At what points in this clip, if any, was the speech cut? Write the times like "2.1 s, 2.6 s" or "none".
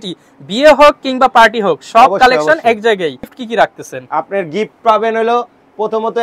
3.3 s